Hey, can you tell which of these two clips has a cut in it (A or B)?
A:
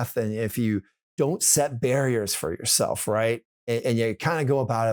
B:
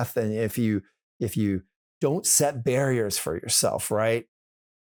A